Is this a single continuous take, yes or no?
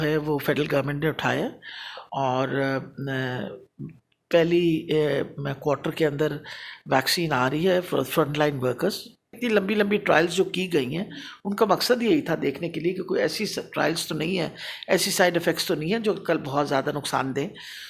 no